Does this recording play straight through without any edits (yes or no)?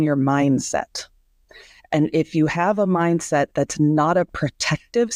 yes